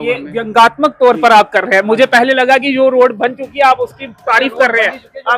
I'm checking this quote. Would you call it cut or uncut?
uncut